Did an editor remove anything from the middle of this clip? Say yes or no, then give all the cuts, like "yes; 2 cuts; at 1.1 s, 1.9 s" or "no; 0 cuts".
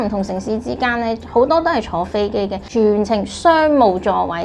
yes; 1 cut; at 2.6 s